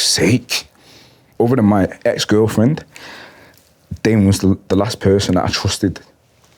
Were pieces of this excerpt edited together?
yes; 1 cut; at 1.3 s

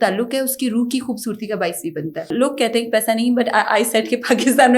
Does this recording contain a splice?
yes; 1 cut; at 2.3 s

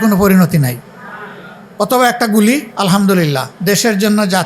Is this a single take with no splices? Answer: no; 2 cuts; at 2.7 s, 3.5 s

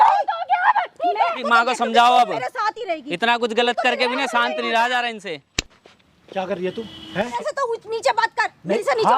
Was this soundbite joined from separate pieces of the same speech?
yes; 2 cuts; at 1.5 s, 7.4 s

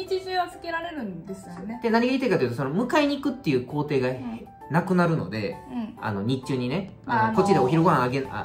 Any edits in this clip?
no; 0 cuts

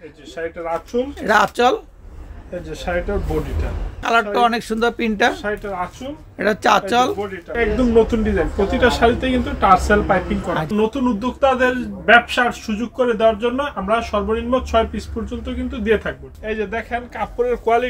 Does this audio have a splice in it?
yes; 4 cuts; at 4.0 s, 7.5 s, 10.7 s, 16.3 s

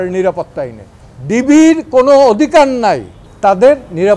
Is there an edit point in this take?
no; 0 cuts

